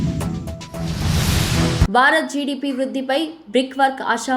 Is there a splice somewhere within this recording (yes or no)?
yes